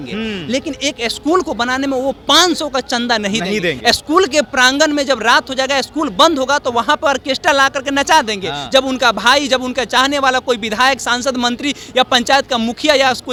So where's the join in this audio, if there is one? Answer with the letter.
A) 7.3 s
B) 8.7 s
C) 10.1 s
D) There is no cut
D